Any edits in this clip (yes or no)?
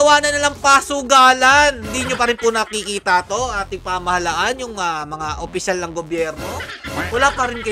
no